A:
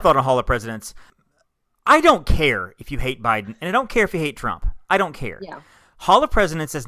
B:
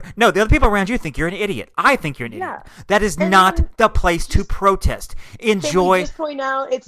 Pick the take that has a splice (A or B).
A